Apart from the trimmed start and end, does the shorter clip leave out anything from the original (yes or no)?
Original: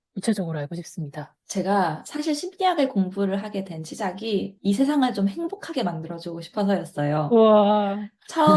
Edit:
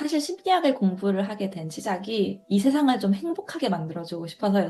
no